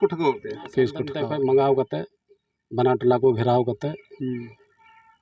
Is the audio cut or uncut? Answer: cut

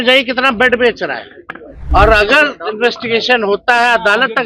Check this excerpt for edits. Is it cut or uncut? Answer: cut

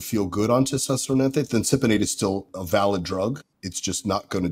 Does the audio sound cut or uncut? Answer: cut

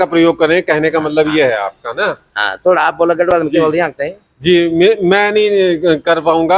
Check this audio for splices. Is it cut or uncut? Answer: uncut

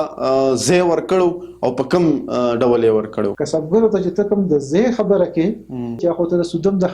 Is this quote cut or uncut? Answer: cut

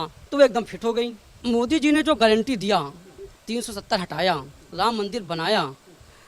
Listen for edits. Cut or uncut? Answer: cut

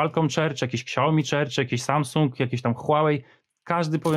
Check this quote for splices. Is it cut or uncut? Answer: uncut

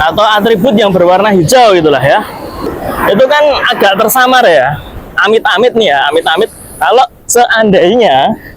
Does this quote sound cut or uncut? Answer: cut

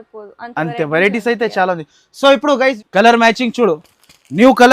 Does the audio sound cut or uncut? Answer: cut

